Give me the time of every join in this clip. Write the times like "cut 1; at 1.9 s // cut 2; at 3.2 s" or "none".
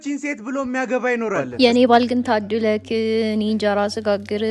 cut 1; at 1.4 s